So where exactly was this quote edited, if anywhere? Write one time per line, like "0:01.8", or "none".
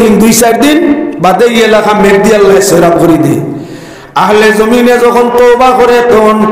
none